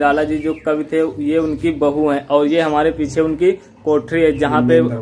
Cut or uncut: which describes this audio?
uncut